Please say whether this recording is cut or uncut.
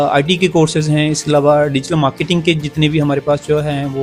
uncut